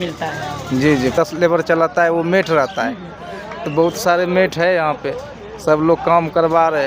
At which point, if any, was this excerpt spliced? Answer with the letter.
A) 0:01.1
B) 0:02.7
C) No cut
A